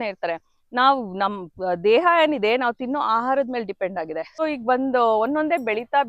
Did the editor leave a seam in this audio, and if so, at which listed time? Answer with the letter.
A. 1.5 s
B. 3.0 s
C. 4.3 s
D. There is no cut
C